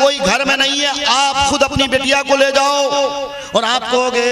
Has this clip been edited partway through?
yes; 1 cut; at 3.3 s

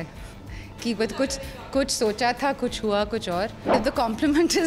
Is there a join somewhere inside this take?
yes; 1 cut; at 3.7 s

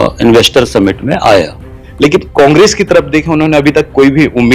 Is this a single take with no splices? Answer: no; 1 cut; at 1.6 s

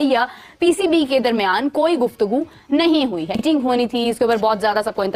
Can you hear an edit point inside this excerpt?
no; 0 cuts

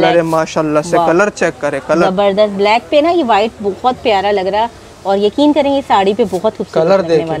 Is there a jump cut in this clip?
no; 0 cuts

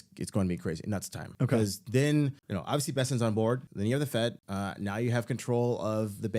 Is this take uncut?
no; 4 cuts; at 1.2 s, 2.5 s, 3.7 s, 4.4 s

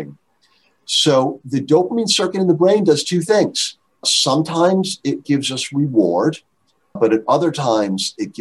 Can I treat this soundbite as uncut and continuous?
yes; 0 cuts

